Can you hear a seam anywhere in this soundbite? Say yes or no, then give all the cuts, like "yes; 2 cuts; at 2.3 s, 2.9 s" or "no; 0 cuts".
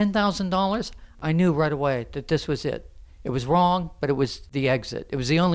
yes; 2 cuts; at 1.1 s, 4.4 s